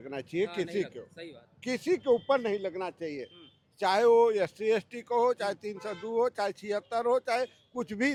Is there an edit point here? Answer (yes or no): no